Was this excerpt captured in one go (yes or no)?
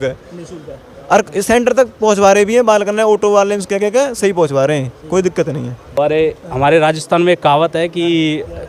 no